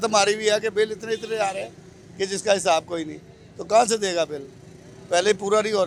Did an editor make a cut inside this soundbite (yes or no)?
no